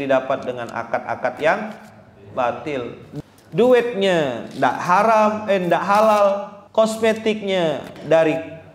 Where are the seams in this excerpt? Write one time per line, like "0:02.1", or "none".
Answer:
0:03.1
0:06.6